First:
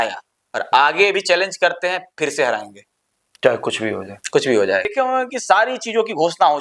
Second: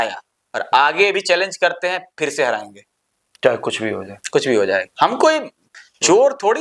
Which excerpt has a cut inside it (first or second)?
first